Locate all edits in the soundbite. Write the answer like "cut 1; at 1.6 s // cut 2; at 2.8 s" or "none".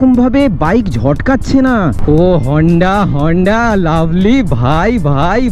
cut 1; at 2.0 s